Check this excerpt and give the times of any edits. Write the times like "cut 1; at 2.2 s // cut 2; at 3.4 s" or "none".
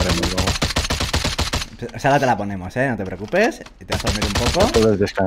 none